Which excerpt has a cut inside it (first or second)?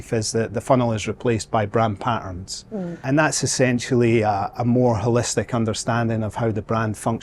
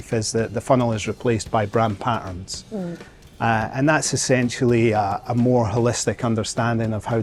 first